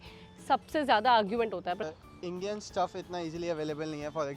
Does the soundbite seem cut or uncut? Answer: cut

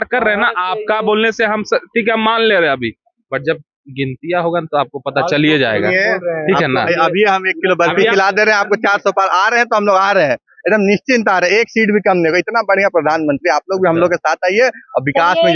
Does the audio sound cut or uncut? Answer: uncut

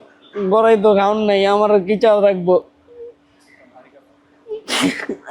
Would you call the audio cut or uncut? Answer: uncut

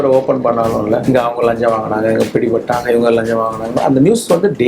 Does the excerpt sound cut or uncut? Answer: cut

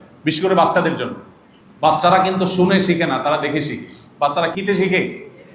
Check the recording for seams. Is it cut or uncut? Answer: cut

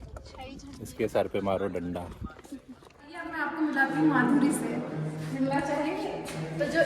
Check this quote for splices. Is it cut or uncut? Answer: cut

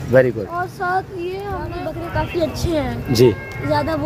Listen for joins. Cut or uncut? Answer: cut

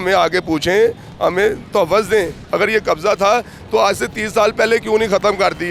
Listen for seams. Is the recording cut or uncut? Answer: cut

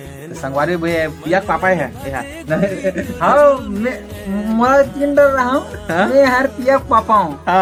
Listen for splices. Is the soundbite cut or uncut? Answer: uncut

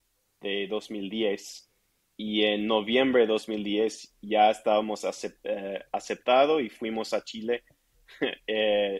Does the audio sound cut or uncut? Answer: uncut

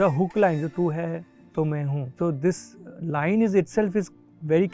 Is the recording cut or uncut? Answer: cut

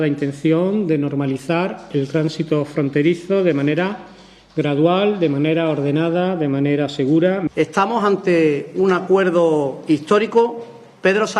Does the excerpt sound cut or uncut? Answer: cut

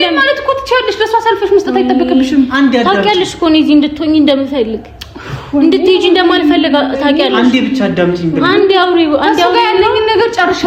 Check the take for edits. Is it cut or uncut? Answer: uncut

